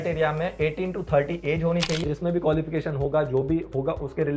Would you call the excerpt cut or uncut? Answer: cut